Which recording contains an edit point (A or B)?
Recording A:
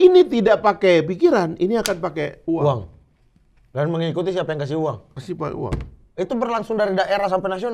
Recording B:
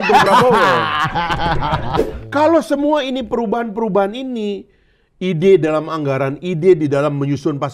B